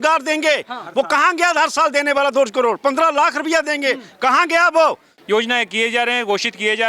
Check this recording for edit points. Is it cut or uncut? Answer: cut